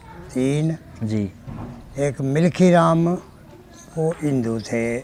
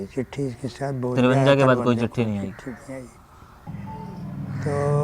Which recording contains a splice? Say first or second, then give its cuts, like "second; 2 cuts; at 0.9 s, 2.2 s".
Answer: second; 1 cut; at 3.7 s